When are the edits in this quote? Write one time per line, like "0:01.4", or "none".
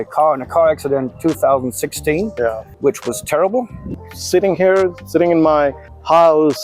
0:02.7
0:03.9